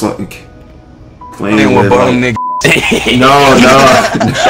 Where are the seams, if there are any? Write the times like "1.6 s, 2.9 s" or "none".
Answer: none